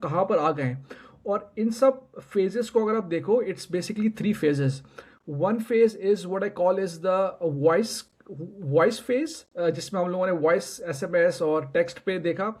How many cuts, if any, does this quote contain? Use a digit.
0